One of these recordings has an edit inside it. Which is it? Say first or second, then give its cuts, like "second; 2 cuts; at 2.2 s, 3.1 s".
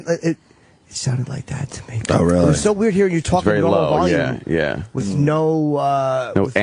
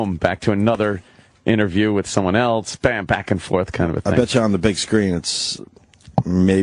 second; 1 cut; at 5.4 s